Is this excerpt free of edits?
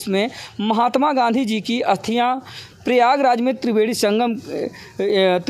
yes; 0 cuts

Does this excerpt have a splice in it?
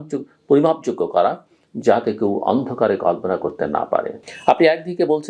yes; 1 cut; at 4.1 s

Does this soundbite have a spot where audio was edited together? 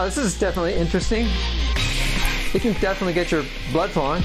no; 0 cuts

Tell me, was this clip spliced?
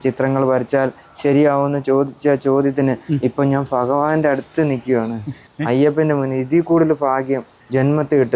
no; 0 cuts

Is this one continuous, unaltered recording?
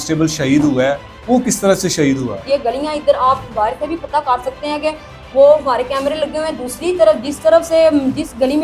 yes; 0 cuts

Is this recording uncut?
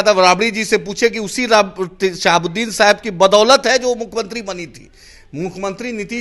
yes; 0 cuts

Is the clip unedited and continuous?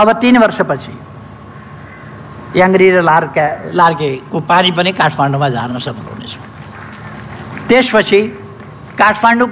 yes; 0 cuts

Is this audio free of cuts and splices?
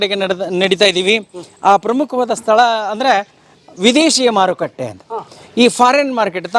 yes; 0 cuts

